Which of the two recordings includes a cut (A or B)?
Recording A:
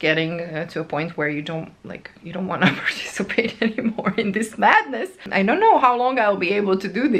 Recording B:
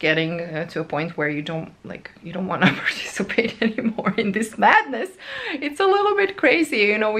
A